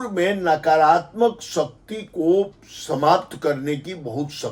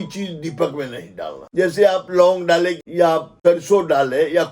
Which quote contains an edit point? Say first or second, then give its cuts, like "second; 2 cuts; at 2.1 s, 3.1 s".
second; 2 cuts; at 1.4 s, 2.9 s